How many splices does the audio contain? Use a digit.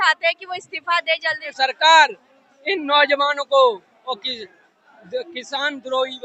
1